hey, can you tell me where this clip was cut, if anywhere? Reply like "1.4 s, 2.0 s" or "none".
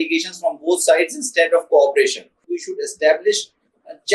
2.6 s